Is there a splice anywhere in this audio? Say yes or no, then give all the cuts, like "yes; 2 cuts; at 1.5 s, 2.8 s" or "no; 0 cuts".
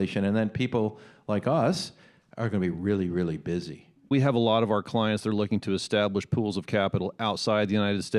yes; 1 cut; at 4.1 s